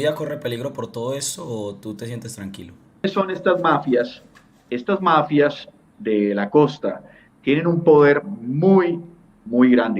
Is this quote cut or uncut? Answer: cut